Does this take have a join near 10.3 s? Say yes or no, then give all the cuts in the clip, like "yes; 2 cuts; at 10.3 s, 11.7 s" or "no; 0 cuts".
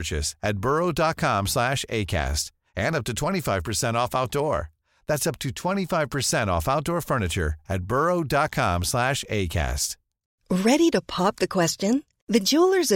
yes; 1 cut; at 10.3 s